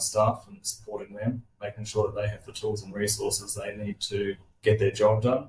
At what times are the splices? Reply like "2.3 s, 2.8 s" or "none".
4.5 s